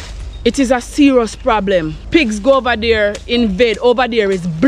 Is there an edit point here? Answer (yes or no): yes